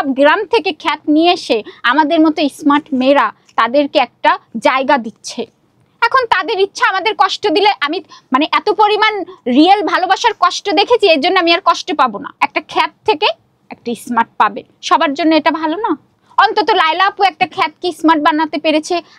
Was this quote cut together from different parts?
yes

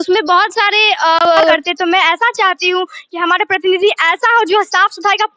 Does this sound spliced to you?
yes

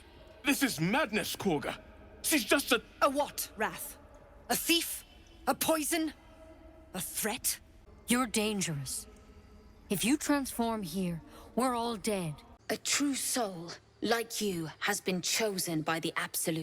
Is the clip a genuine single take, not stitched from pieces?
no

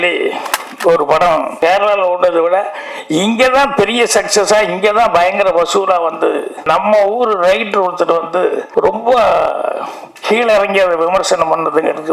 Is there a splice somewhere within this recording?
yes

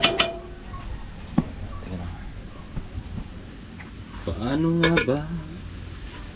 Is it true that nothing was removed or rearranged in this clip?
yes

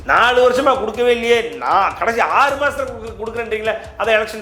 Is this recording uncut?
yes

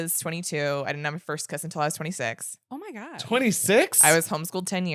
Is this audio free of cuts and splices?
yes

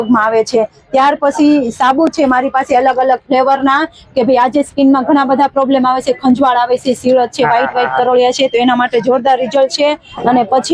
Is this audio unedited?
yes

